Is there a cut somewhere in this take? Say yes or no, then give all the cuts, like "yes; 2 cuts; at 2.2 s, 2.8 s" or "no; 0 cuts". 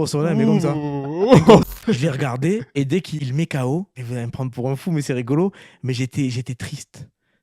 yes; 3 cuts; at 1.6 s, 3.1 s, 4.0 s